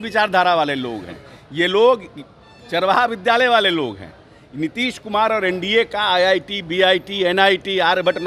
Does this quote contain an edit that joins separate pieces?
no; 0 cuts

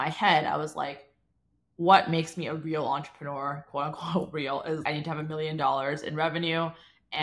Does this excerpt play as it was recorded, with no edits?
no; 1 cut; at 4.8 s

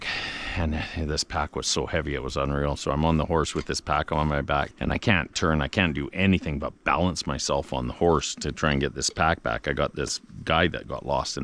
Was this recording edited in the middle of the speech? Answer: no; 0 cuts

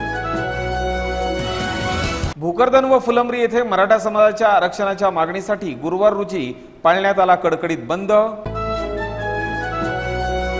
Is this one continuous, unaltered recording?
no; 1 cut; at 2.3 s

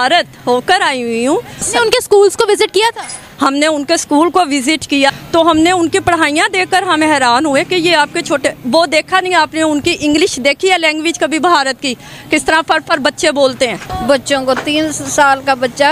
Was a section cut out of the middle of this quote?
yes; 3 cuts; at 1.7 s, 5.1 s, 13.9 s

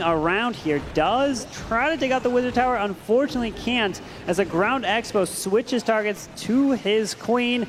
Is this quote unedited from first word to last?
yes; 0 cuts

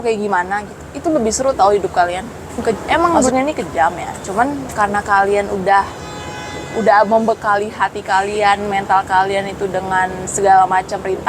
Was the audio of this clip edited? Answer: yes; 1 cut; at 2.6 s

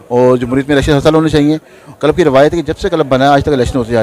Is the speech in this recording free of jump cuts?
yes; 0 cuts

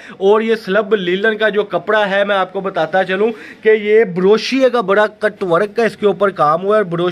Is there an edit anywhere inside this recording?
no; 0 cuts

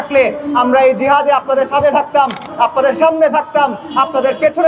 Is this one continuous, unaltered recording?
yes; 0 cuts

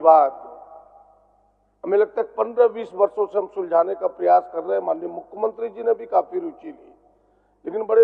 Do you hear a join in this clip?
no; 0 cuts

